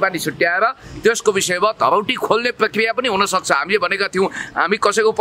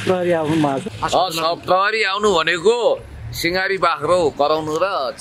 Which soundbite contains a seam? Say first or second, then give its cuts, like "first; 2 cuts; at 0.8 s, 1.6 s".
second; 1 cut; at 0.9 s